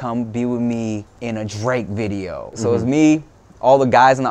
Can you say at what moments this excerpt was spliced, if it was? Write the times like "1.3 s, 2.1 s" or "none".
1.1 s, 2.6 s